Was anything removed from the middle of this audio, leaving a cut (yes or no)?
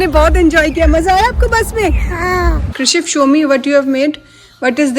yes